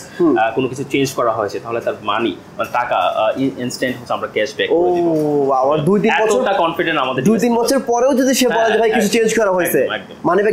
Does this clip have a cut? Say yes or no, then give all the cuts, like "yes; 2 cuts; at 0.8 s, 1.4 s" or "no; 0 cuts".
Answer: no; 0 cuts